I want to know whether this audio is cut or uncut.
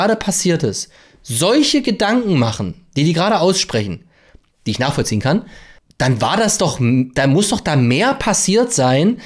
uncut